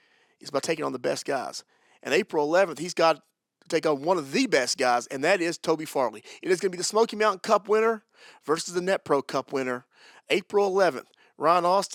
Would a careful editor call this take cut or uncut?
uncut